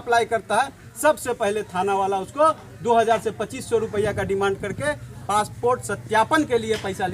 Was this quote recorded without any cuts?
yes; 0 cuts

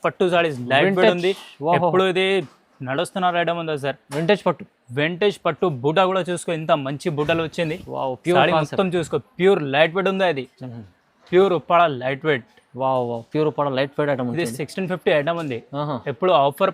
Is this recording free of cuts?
no; 1 cut; at 10.5 s

